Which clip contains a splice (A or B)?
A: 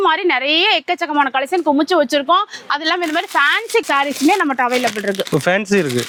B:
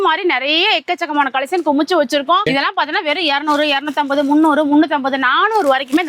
B